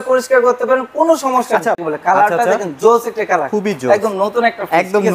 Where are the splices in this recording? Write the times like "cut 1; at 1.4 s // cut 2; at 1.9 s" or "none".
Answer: cut 1; at 1.8 s